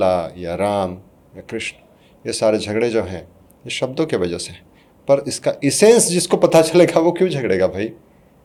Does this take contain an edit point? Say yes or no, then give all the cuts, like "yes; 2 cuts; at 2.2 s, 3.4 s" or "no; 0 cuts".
no; 0 cuts